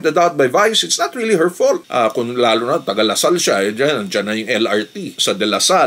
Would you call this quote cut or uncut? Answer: cut